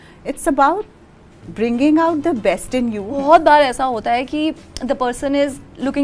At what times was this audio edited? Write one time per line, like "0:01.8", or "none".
0:03.2